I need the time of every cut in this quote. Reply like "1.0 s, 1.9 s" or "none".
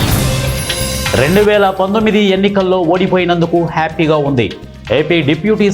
1.1 s